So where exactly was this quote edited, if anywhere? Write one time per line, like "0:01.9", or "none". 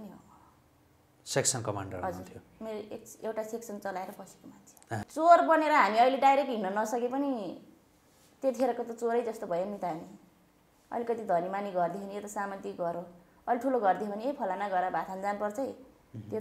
0:05.1

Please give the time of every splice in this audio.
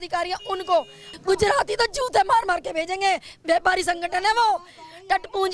0:01.0

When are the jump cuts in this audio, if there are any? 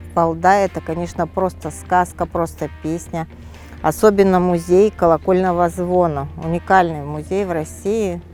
none

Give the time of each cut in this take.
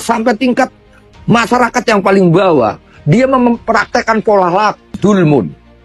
0:04.8

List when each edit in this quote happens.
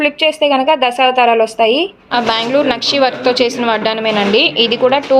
0:02.1

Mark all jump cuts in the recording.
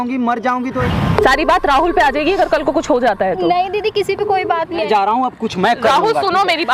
0:00.8
0:04.8

